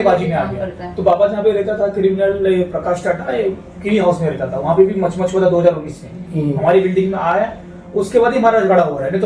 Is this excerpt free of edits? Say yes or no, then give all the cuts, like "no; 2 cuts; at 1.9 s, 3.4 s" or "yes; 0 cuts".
yes; 0 cuts